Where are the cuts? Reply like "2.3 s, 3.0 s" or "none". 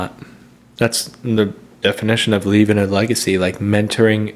none